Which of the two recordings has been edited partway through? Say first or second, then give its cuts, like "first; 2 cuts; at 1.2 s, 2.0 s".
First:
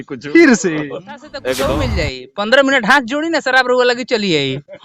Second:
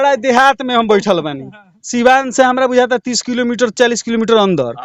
first; 1 cut; at 1.7 s